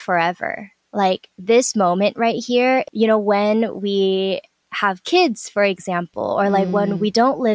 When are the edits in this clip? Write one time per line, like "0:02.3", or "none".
0:02.9